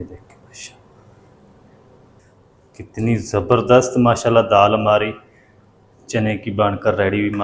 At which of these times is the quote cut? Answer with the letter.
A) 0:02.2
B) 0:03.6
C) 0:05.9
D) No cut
A